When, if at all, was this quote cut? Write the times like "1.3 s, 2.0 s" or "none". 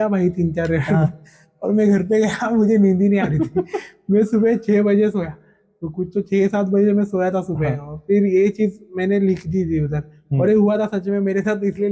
none

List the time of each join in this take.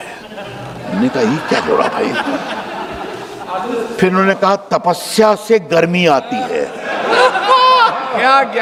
none

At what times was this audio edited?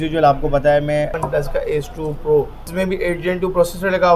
1.2 s, 2.6 s

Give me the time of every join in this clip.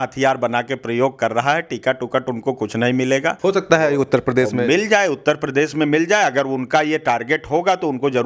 none

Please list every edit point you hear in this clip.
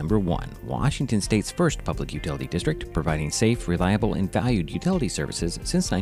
none

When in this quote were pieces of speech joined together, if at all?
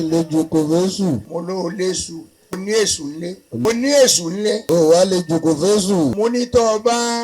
1.3 s, 2.6 s, 3.7 s, 4.6 s, 6.1 s

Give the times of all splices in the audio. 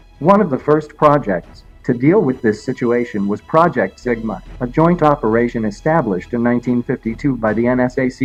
none

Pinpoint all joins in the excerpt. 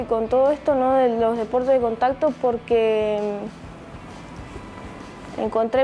none

